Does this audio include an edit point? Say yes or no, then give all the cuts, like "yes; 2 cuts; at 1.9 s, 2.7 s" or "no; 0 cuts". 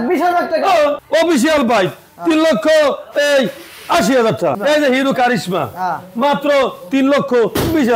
yes; 2 cuts; at 1.0 s, 4.6 s